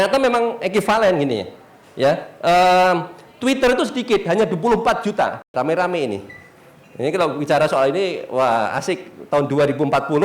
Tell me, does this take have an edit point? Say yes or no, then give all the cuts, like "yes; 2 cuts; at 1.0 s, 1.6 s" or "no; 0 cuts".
yes; 1 cut; at 5.4 s